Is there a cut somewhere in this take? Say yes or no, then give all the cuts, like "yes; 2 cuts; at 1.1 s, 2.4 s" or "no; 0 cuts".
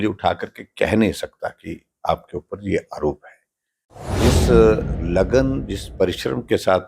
yes; 1 cut; at 4.1 s